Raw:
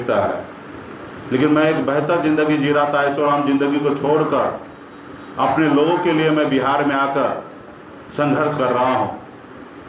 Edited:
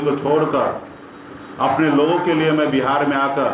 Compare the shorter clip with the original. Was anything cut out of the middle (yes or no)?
no